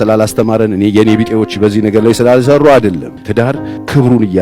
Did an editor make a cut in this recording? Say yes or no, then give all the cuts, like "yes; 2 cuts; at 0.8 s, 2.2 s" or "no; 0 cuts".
yes; 1 cut; at 3.5 s